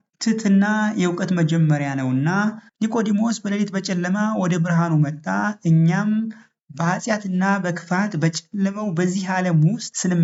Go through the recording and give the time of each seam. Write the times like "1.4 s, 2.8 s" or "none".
none